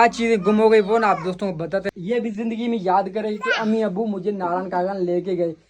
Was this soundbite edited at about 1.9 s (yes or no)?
yes